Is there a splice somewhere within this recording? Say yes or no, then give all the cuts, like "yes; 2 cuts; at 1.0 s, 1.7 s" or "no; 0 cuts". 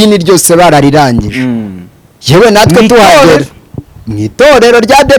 no; 0 cuts